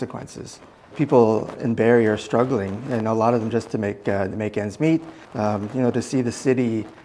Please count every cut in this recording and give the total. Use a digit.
2